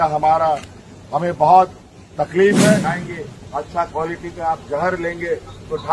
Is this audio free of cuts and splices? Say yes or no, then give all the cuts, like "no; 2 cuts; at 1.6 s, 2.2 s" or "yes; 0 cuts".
no; 1 cut; at 2.8 s